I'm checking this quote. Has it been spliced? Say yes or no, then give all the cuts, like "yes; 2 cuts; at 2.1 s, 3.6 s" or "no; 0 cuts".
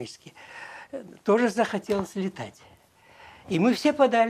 no; 0 cuts